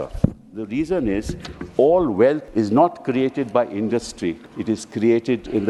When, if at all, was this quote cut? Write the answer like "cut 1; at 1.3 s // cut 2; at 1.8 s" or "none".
cut 1; at 2.4 s // cut 2; at 4.5 s